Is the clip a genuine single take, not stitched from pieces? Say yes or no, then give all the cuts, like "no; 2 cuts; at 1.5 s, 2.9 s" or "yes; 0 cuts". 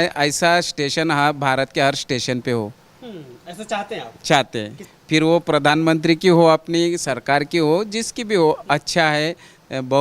yes; 0 cuts